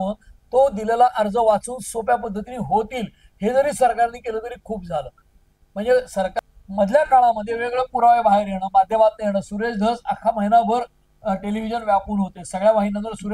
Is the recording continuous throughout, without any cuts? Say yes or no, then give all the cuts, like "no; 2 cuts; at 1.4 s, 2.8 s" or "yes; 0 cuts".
no; 1 cut; at 6.3 s